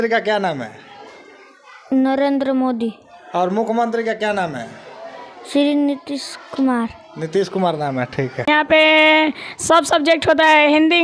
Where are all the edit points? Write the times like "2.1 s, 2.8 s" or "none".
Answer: 8.5 s